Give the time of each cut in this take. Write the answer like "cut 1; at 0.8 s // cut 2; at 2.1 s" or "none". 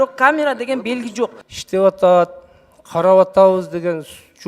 cut 1; at 1.4 s

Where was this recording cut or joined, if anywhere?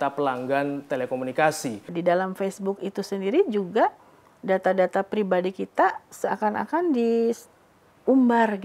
cut 1; at 1.8 s

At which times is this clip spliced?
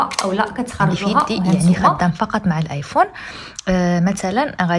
cut 1; at 1.6 s

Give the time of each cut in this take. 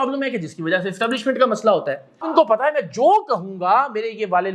cut 1; at 2.3 s

